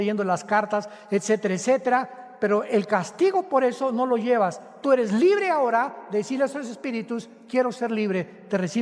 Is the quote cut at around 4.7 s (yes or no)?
yes